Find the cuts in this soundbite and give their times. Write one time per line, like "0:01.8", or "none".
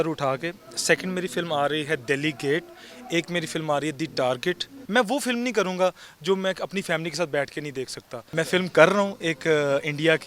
0:04.7
0:08.1